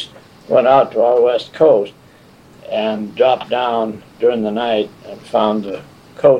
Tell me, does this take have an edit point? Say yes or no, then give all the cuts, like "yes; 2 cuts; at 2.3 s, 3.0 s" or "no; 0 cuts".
no; 0 cuts